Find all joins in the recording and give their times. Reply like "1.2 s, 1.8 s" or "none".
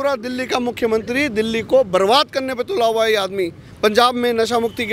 none